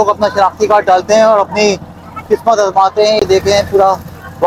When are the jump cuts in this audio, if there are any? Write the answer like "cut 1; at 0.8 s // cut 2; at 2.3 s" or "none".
none